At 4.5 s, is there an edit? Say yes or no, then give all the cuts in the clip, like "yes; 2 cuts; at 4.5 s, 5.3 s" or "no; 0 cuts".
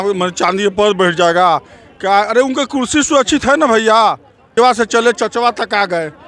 yes; 1 cut; at 4.5 s